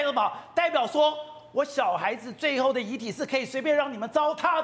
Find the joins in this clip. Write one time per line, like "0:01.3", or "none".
none

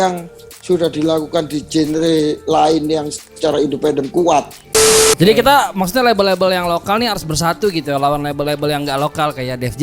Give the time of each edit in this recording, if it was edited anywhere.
0:04.6

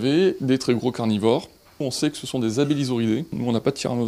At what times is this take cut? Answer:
none

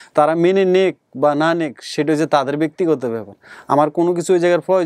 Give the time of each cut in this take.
none

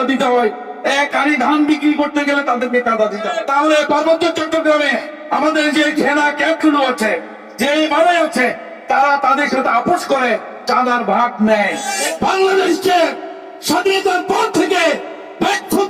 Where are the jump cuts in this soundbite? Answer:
0:03.3
0:12.0

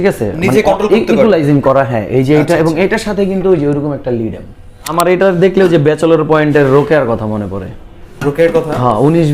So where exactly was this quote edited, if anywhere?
0:04.9

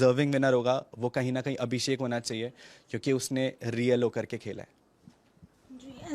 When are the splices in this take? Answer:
none

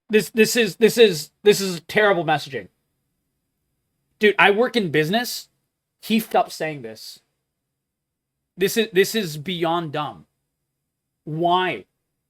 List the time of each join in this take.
0:06.3

